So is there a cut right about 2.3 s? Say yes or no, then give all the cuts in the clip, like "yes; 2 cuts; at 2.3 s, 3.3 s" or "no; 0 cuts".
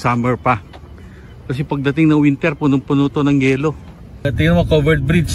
no; 1 cut; at 4.3 s